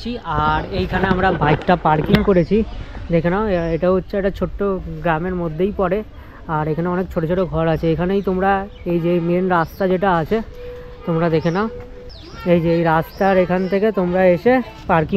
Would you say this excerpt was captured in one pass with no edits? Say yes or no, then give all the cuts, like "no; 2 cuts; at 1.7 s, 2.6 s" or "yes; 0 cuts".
yes; 0 cuts